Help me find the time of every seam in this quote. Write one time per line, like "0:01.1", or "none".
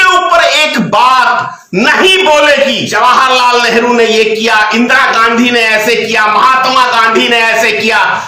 0:02.9